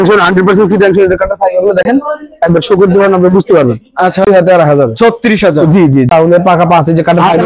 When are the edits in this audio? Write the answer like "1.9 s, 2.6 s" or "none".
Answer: 4.3 s, 6.1 s